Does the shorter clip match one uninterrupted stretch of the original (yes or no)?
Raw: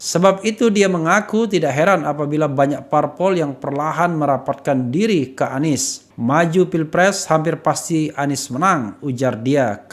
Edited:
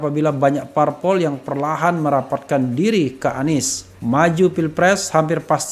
yes